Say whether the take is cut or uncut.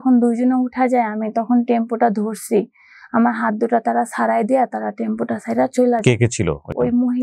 uncut